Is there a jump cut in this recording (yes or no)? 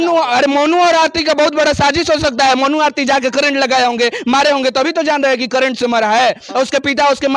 no